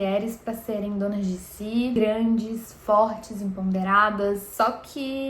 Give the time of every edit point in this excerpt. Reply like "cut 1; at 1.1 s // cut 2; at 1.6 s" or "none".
cut 1; at 1.9 s // cut 2; at 4.5 s